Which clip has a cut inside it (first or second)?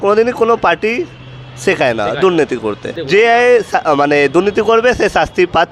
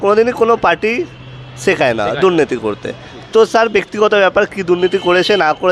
first